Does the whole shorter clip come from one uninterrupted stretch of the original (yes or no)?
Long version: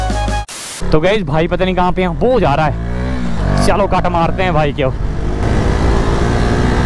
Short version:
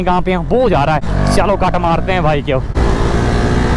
no